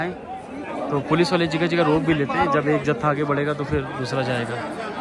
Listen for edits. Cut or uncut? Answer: uncut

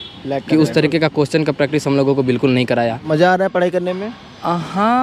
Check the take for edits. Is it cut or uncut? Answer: cut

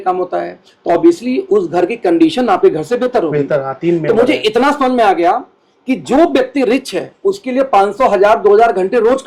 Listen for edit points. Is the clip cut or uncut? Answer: uncut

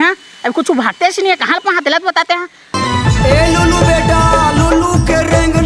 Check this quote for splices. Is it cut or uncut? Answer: cut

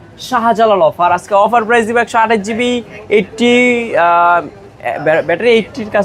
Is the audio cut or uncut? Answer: uncut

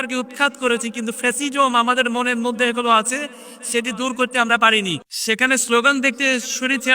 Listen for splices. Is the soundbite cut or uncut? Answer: cut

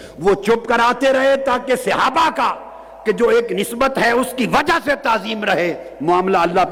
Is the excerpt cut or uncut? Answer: uncut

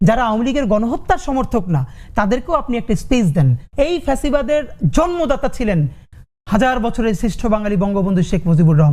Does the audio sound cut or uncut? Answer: cut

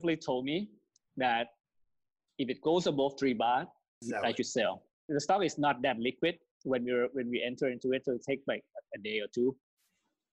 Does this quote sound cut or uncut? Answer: cut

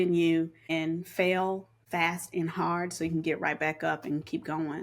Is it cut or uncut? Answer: cut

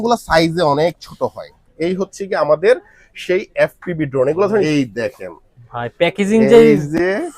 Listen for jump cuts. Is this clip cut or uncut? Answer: cut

